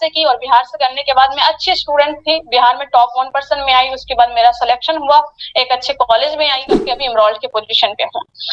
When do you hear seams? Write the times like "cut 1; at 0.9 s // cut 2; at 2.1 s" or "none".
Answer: cut 1; at 6.9 s